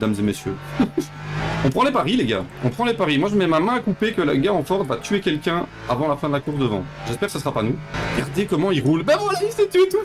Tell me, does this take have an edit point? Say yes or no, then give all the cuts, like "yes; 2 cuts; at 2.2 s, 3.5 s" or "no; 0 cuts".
yes; 2 cuts; at 1.4 s, 7.9 s